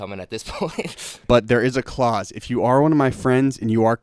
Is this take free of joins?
no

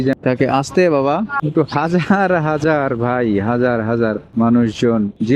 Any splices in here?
yes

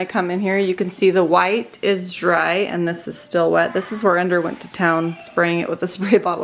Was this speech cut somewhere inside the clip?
no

